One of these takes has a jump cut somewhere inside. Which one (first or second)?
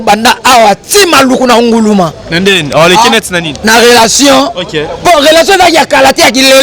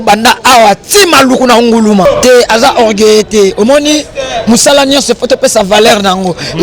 second